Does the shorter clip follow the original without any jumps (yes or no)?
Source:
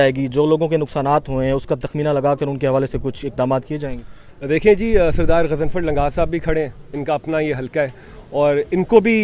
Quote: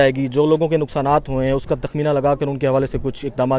yes